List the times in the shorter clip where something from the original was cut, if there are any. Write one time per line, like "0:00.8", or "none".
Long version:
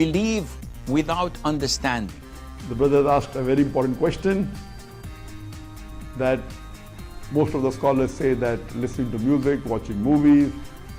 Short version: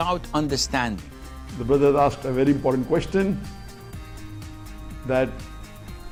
none